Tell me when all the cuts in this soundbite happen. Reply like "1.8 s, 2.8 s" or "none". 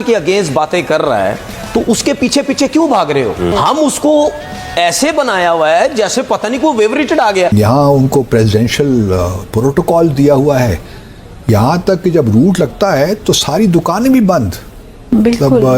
3.5 s, 7.5 s